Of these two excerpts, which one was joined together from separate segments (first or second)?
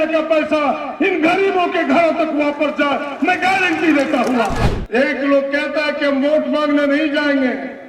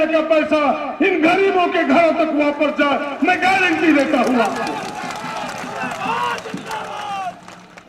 first